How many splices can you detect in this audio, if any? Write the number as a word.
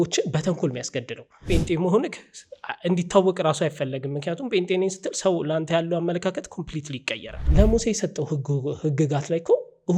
two